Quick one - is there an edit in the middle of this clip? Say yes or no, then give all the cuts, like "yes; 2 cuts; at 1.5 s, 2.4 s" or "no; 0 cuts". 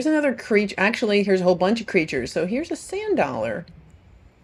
no; 0 cuts